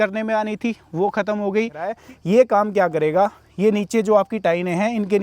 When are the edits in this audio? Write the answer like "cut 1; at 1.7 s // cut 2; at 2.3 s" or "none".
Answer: cut 1; at 2.0 s